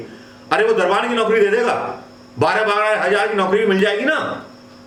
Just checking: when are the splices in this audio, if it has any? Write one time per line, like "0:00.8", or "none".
none